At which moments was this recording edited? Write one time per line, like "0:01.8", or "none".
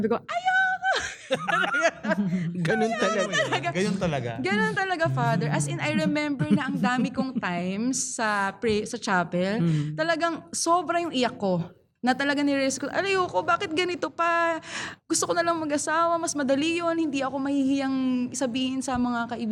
none